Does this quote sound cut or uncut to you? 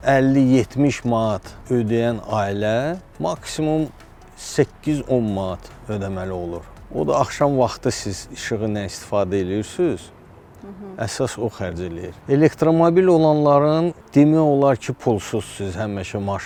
uncut